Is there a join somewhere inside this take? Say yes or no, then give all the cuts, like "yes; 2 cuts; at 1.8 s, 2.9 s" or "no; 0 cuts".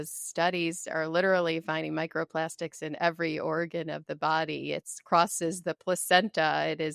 no; 0 cuts